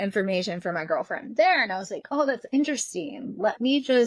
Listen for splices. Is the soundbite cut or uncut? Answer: uncut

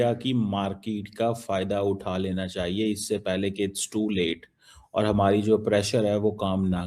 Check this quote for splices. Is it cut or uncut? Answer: uncut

